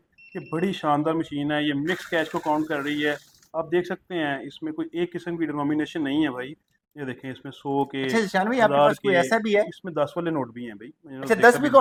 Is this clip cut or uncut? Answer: uncut